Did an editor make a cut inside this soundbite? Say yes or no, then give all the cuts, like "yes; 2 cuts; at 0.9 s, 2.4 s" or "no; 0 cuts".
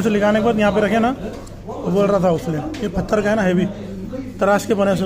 no; 0 cuts